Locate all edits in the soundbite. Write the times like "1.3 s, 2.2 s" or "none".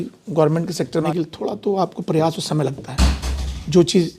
1.0 s